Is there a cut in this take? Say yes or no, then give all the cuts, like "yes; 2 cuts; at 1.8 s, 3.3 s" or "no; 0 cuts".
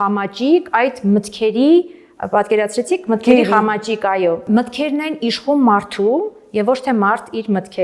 no; 0 cuts